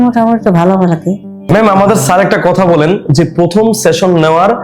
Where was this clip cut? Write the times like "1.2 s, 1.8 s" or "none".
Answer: 1.3 s

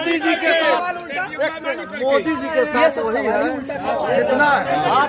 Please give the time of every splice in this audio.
none

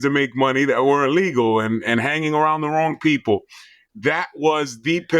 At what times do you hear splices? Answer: none

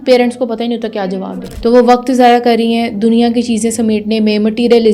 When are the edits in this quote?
1.4 s

